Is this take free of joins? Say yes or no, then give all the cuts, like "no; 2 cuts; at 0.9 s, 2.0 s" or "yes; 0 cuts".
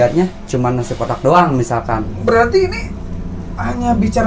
yes; 0 cuts